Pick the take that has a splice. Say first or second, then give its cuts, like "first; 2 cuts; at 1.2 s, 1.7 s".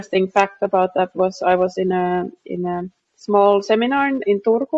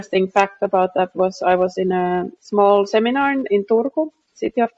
second; 1 cut; at 2.4 s